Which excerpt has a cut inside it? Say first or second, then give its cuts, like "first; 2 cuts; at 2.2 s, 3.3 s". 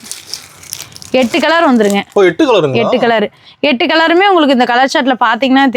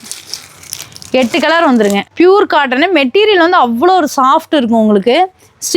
second; 1 cut; at 2.0 s